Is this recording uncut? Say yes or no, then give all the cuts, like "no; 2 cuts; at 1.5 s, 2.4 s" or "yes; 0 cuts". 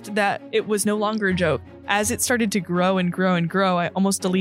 no; 1 cut; at 1.6 s